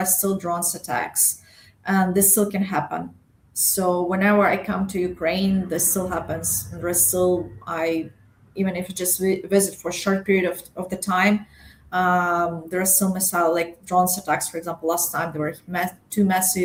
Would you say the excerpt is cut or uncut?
uncut